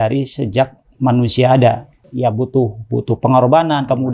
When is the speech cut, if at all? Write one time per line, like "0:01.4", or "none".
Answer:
0:02.0

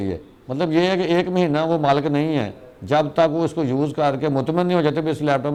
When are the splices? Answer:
none

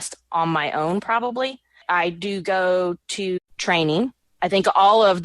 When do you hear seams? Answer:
0:01.8
0:03.4
0:04.2

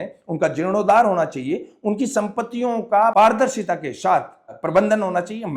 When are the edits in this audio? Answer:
0:03.1
0:04.5

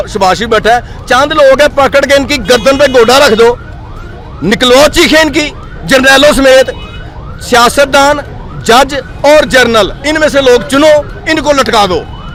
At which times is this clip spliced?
none

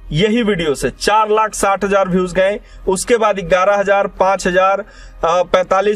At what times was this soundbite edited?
none

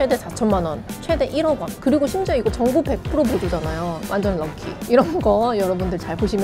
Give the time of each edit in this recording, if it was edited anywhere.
0:00.9
0:04.0

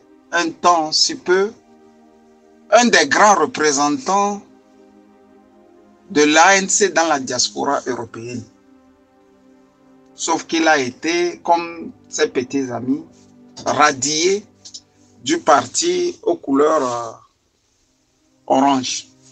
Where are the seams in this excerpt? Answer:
0:04.4
0:06.1
0:08.5
0:10.2

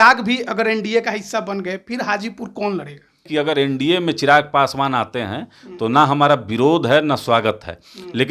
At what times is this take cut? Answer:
0:03.3

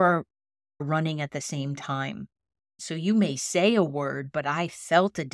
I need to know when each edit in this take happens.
0:02.7

